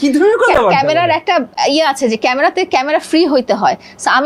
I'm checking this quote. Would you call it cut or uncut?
uncut